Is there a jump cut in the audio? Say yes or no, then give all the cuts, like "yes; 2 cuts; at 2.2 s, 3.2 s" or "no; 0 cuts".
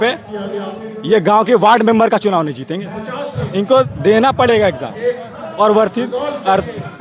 yes; 1 cut; at 3.3 s